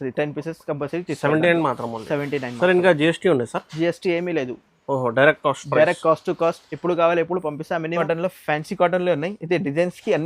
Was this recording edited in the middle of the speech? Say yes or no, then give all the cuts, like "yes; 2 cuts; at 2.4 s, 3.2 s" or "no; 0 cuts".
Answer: yes; 1 cut; at 7.9 s